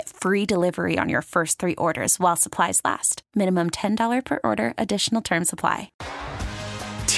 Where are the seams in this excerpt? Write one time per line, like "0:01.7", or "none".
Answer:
0:06.0